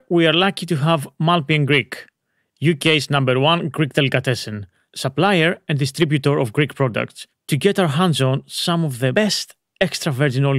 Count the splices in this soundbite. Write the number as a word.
one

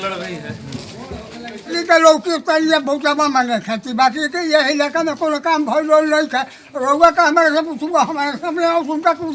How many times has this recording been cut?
one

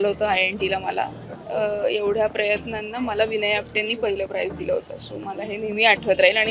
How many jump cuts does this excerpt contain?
one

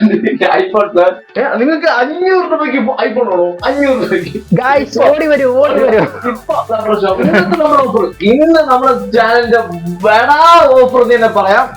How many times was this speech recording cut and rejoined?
two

